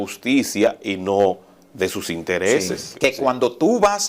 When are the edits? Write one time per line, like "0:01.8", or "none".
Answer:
0:02.9